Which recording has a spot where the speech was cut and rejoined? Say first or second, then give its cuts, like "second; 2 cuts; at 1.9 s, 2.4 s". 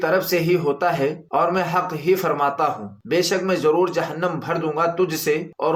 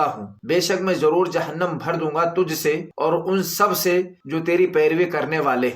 second; 1 cut; at 4.2 s